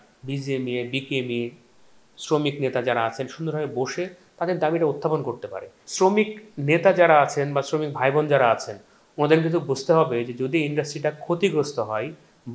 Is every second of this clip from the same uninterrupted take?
no; 1 cut; at 5.8 s

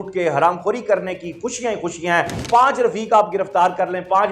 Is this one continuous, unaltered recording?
no; 1 cut; at 2.5 s

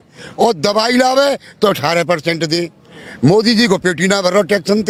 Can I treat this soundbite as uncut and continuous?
yes; 0 cuts

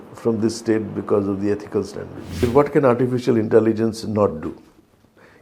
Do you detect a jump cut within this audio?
yes; 1 cut; at 2.4 s

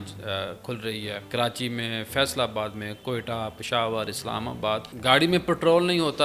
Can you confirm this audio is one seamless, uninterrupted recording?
no; 2 cuts; at 1.2 s, 4.9 s

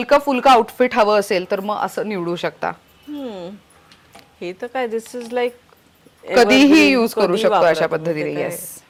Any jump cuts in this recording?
no; 0 cuts

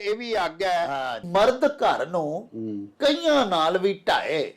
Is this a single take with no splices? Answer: no; 1 cut; at 1.2 s

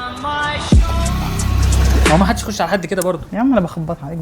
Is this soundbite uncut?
no; 1 cut; at 2.1 s

